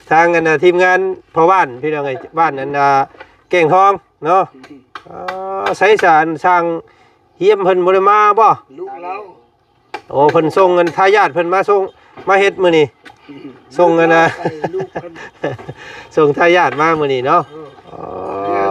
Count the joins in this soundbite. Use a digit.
0